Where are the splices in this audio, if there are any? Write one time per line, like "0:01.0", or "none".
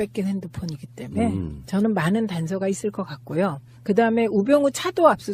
0:02.2